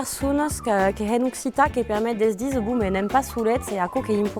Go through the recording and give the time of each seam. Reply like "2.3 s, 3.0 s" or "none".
none